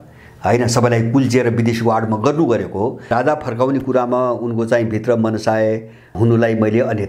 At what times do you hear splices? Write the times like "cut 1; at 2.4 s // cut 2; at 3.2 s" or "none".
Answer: cut 1; at 3.1 s // cut 2; at 6.1 s